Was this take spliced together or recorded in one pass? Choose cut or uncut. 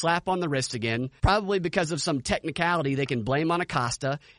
cut